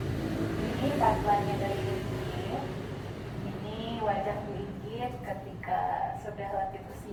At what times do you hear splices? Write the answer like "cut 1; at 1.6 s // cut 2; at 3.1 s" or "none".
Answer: none